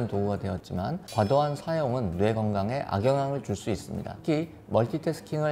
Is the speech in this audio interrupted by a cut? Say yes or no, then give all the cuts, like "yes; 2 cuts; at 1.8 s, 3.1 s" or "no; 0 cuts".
no; 0 cuts